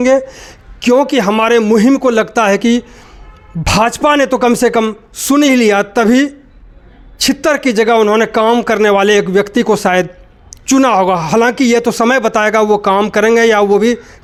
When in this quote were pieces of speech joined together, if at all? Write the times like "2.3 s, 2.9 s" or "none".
none